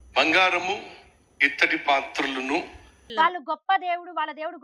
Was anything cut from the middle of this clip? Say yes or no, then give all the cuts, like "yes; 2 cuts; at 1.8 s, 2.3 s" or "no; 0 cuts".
yes; 1 cut; at 3.0 s